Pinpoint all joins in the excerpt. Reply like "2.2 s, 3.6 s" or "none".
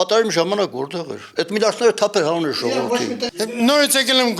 3.2 s